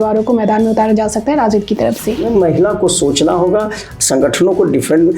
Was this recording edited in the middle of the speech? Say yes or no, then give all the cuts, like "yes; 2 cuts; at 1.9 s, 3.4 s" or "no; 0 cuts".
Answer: yes; 1 cut; at 2.2 s